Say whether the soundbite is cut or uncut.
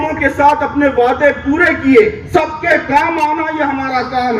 cut